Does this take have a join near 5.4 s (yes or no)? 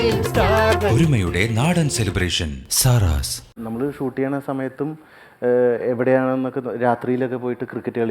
no